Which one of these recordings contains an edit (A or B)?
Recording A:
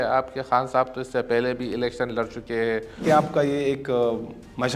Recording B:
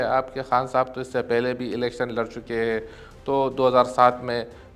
A